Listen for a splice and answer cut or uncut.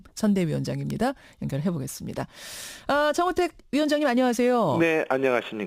uncut